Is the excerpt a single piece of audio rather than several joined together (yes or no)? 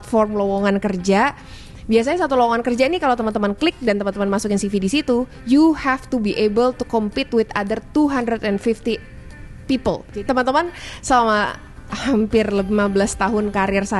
no